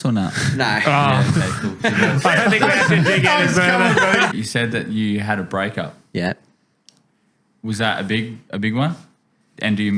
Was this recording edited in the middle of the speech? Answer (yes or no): yes